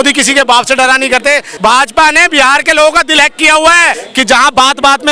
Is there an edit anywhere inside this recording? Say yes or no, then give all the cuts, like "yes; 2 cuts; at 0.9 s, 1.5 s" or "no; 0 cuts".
yes; 2 cuts; at 1.5 s, 4.0 s